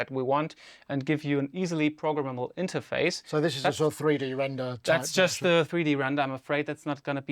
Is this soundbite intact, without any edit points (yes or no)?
yes